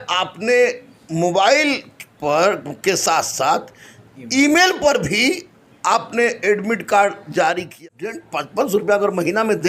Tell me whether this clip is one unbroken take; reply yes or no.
no